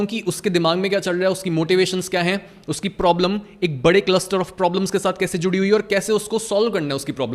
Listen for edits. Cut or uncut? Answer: uncut